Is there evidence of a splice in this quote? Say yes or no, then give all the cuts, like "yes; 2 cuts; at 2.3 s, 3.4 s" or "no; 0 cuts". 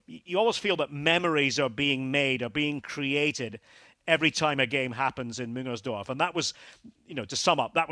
no; 0 cuts